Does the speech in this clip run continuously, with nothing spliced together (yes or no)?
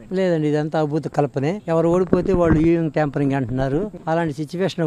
yes